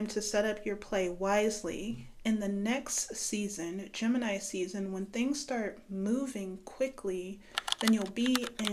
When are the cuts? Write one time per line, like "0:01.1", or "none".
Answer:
none